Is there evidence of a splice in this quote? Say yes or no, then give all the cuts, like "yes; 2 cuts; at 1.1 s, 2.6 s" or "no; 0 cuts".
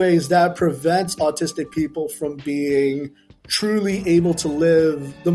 no; 0 cuts